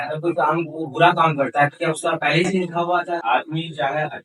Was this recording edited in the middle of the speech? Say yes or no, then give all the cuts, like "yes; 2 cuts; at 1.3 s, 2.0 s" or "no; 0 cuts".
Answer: yes; 1 cut; at 3.2 s